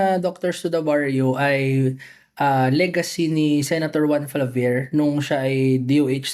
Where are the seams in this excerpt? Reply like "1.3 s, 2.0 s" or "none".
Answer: none